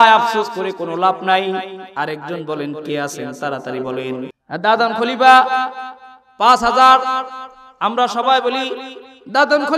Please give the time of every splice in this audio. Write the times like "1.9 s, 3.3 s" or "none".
4.4 s